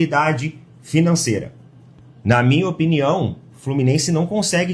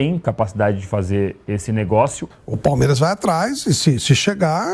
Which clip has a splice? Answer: second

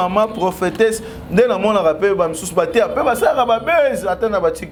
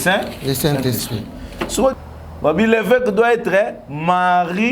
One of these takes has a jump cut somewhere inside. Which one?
second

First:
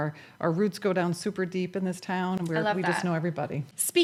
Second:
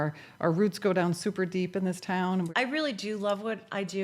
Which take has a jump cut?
second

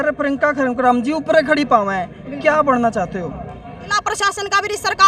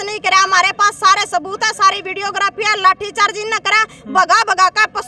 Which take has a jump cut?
first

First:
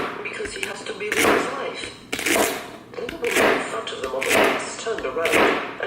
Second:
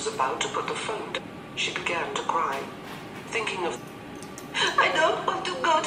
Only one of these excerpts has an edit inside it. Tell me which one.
first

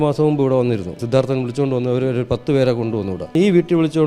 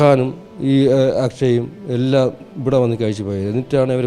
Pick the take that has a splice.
first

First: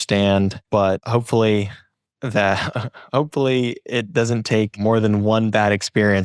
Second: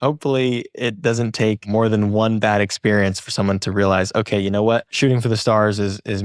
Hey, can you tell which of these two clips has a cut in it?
second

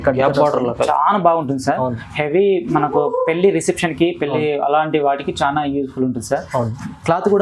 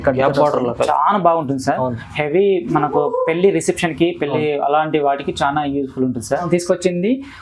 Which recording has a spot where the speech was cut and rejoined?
second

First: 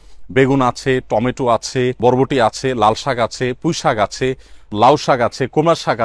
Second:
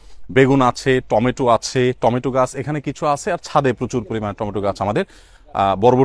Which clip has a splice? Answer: first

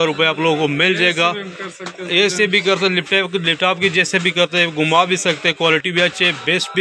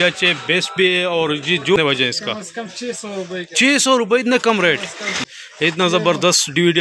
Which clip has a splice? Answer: second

